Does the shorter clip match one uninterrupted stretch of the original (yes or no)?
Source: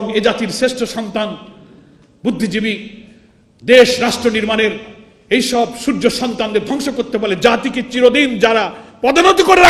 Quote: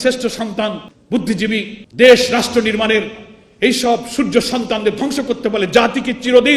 no